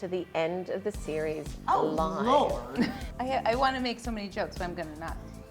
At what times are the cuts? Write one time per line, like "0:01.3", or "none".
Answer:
0:03.0